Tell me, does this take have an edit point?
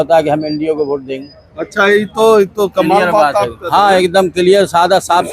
no; 0 cuts

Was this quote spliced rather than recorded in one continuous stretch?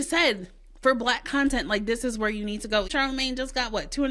yes; 1 cut; at 2.9 s

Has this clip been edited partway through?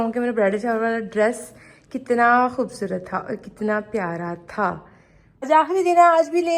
yes; 1 cut; at 5.5 s

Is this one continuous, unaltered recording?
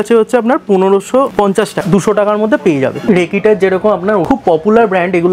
no; 3 cuts; at 1.8 s, 3.0 s, 4.2 s

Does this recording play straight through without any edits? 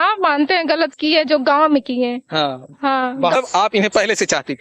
no; 1 cut; at 3.4 s

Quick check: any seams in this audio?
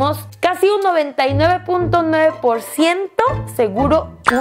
no; 0 cuts

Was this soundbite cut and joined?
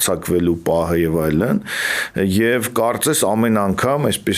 no; 0 cuts

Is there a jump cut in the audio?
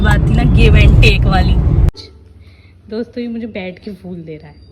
yes; 1 cut; at 2.0 s

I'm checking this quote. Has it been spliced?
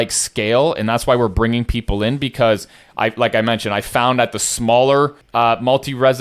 yes; 1 cut; at 5.2 s

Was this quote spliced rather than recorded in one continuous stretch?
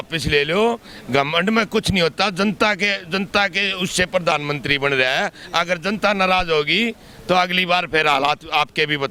no; 0 cuts

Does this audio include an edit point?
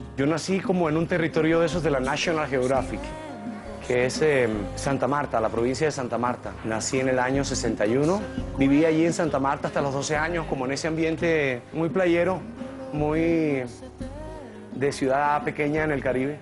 yes; 1 cut; at 5.3 s

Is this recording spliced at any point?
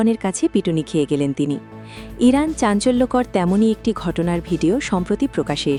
no; 0 cuts

